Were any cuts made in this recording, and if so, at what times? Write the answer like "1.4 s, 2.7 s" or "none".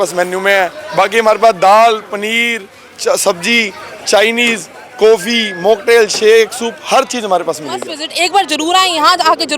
8.0 s